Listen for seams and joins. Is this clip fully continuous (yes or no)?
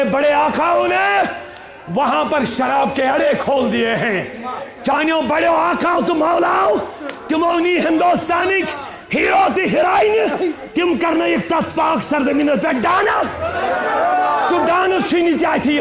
yes